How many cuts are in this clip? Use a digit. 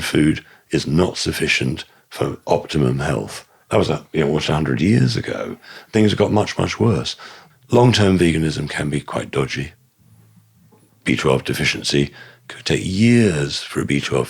1